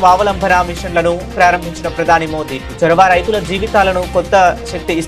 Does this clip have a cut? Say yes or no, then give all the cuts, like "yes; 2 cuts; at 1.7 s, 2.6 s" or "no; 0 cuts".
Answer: no; 0 cuts